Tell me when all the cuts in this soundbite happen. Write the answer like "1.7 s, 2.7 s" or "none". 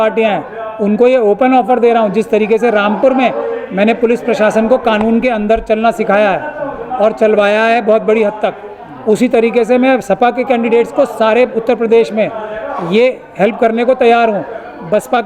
none